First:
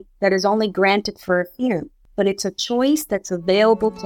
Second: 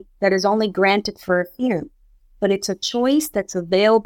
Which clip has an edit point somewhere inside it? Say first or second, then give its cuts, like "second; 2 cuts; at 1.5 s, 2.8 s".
first; 1 cut; at 2.0 s